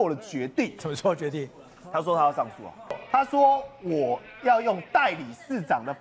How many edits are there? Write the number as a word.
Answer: one